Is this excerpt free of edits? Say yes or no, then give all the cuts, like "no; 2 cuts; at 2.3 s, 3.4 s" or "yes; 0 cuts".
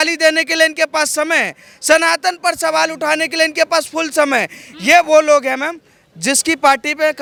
yes; 0 cuts